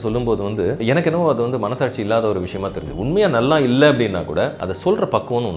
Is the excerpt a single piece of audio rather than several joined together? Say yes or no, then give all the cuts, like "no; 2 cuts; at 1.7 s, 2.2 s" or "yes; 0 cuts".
no; 2 cuts; at 0.8 s, 4.7 s